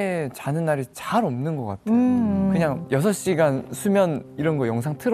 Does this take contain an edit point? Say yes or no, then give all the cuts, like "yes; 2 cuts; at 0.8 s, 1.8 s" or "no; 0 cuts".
no; 0 cuts